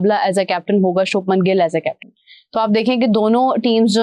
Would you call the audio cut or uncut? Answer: uncut